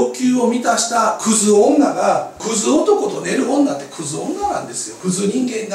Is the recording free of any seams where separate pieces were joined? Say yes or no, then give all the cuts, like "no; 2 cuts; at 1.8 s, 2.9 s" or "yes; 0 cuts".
no; 2 cuts; at 2.4 s, 5.0 s